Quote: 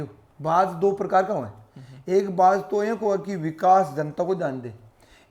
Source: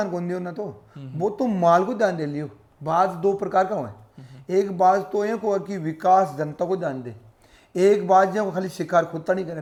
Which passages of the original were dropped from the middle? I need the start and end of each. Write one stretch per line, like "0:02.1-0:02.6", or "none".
none